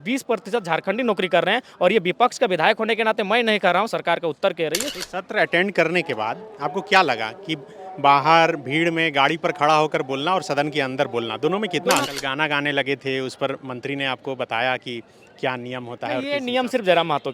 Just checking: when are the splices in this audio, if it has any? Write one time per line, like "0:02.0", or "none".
0:04.9
0:12.1